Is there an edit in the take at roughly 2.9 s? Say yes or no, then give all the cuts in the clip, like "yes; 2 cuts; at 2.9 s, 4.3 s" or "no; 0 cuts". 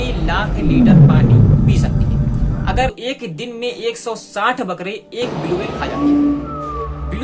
yes; 1 cut; at 2.9 s